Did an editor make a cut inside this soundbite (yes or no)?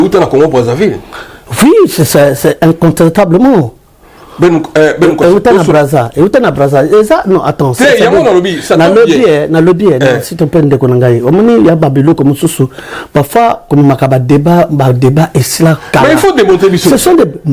no